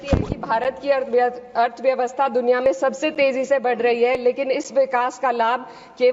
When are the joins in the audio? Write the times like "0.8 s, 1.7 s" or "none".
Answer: none